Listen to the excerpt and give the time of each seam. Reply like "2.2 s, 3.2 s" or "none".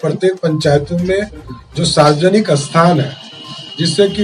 none